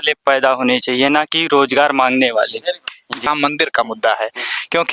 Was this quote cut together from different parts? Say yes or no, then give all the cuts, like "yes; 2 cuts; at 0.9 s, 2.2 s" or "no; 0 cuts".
yes; 1 cut; at 3.3 s